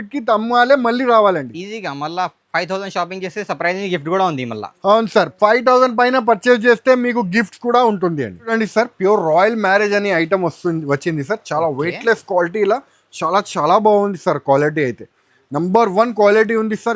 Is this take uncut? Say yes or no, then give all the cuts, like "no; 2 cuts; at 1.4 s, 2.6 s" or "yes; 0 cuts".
yes; 0 cuts